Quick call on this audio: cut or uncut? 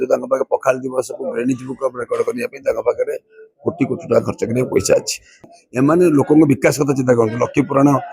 cut